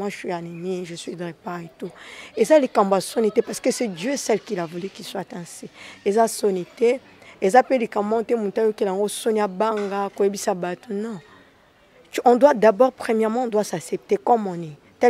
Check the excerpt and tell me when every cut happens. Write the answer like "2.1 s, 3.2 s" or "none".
none